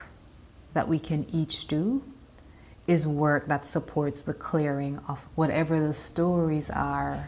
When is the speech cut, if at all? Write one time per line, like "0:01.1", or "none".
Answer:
0:05.1